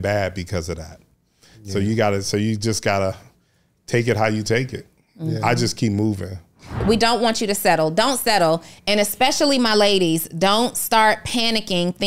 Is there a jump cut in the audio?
yes; 1 cut; at 6.8 s

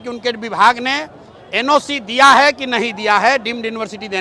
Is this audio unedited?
yes; 0 cuts

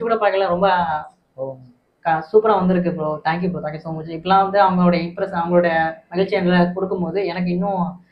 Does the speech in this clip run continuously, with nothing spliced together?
yes; 0 cuts

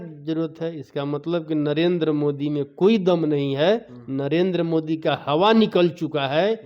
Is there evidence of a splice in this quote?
no; 0 cuts

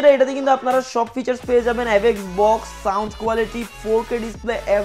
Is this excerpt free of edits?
yes; 0 cuts

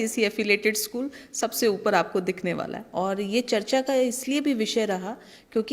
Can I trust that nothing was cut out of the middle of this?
no; 1 cut; at 2.8 s

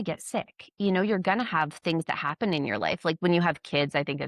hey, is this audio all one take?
no; 1 cut; at 3.2 s

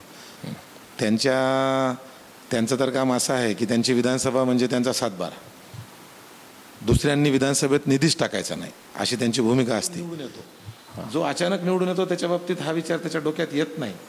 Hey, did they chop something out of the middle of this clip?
yes; 1 cut; at 10.3 s

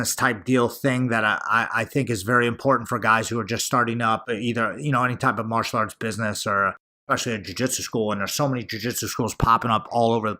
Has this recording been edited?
no; 0 cuts

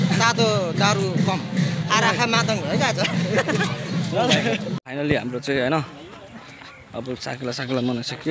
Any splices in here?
yes; 1 cut; at 4.8 s

